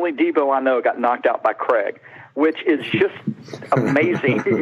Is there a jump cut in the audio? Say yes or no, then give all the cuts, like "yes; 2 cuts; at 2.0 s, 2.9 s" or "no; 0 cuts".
no; 0 cuts